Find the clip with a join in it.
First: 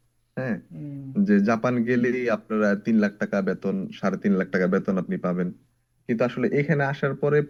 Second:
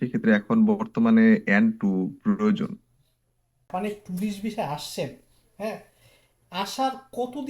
second; 1 cut; at 3.7 s

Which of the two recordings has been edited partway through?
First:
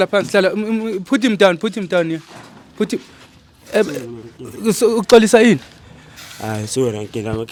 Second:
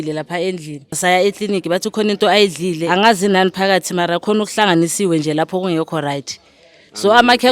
second; 2 cuts; at 1.0 s, 2.8 s

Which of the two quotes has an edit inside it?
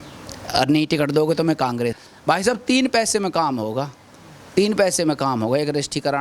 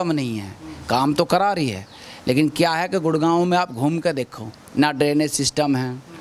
first; 1 cut; at 2.0 s

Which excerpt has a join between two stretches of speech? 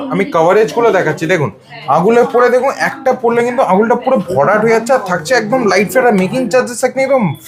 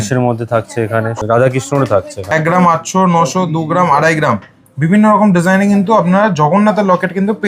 second; 2 cuts; at 1.1 s, 2.3 s

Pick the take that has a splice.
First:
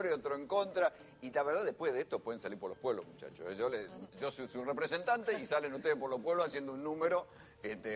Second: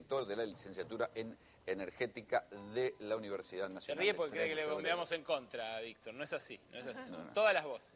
first; 1 cut; at 1.2 s

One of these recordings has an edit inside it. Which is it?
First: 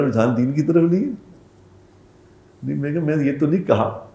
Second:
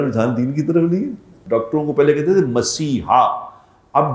second; 1 cut; at 1.3 s

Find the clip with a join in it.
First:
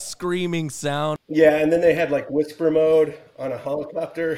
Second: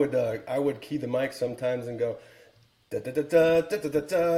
first; 1 cut; at 1.2 s

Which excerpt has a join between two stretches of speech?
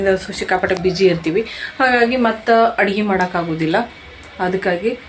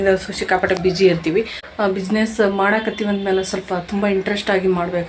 second; 1 cut; at 1.6 s

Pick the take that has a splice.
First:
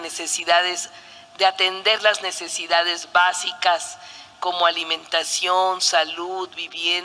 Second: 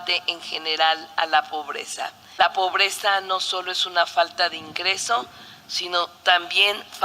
second; 1 cut; at 2.2 s

